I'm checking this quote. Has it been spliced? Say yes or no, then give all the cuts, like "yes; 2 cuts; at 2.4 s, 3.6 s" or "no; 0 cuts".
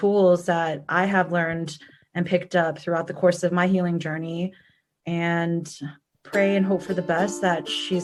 no; 0 cuts